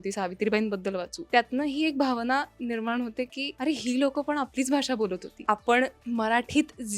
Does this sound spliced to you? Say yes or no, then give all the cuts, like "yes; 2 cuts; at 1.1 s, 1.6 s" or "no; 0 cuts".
yes; 4 cuts; at 1.2 s, 3.4 s, 5.3 s, 6.0 s